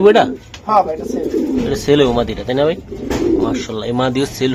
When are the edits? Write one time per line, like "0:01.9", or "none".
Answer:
none